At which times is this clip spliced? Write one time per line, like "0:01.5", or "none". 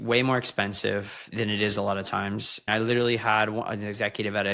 0:01.3
0:02.7